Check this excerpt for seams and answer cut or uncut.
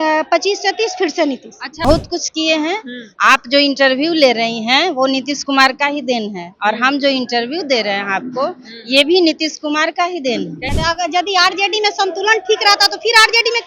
cut